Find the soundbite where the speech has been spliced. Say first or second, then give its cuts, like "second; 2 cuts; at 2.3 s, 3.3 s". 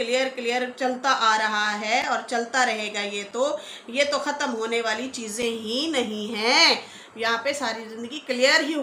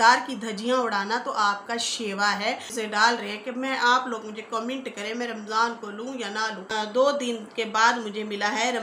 second; 2 cuts; at 2.7 s, 6.7 s